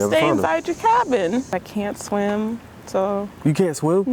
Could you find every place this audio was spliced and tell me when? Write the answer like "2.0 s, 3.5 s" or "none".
1.5 s